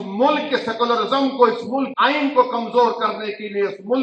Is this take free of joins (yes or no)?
no